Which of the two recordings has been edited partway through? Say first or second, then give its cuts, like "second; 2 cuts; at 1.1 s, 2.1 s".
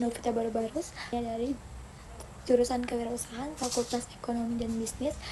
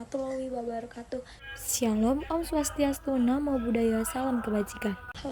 first; 1 cut; at 1.1 s